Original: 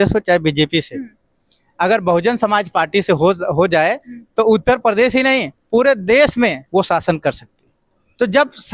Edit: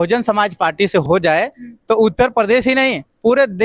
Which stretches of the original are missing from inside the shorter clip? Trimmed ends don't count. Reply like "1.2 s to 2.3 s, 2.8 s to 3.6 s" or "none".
3.2 s to 3.5 s

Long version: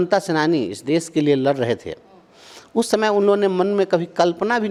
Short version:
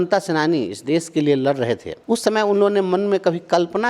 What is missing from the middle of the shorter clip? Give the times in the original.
1.9 s to 2.6 s

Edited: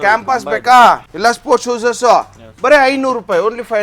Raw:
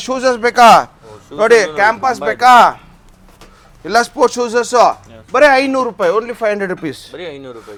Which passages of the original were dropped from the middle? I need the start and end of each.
2.8 s to 3.8 s

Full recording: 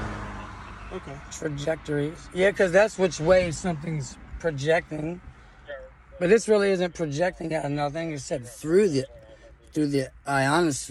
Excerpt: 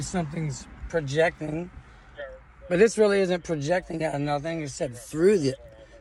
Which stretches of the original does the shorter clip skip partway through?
none

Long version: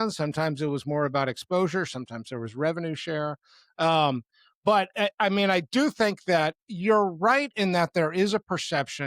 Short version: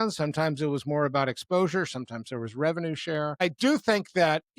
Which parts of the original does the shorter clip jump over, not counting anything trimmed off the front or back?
3.4 s to 5.5 s

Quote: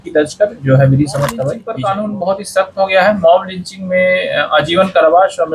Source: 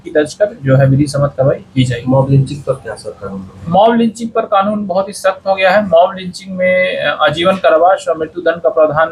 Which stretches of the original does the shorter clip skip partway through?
1.6 s to 4.3 s

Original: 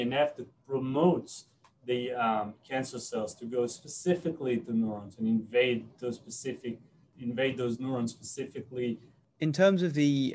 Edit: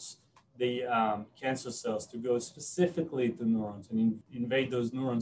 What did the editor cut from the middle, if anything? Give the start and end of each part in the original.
5.5 s to 7.1 s

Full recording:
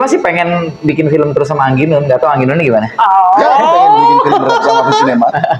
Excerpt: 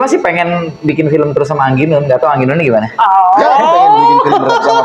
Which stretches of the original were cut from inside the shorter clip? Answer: none

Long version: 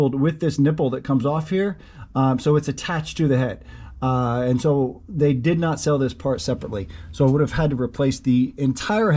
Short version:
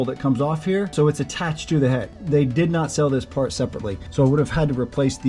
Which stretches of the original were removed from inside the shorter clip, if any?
1.8 s to 2.4 s, 3.6 s to 5.0 s, 6.9 s to 7.0 s

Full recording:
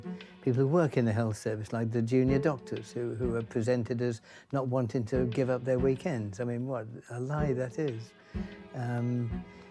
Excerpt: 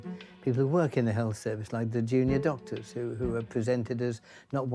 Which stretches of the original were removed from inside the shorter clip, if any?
none

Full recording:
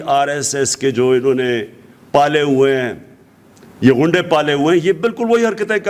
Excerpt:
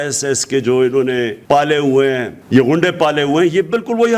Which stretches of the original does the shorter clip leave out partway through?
1.7 s to 2.0 s, 3.0 s to 3.6 s

